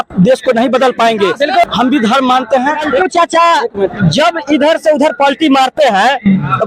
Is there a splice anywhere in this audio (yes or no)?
yes